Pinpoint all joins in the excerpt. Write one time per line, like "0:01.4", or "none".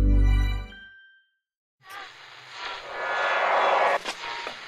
0:01.6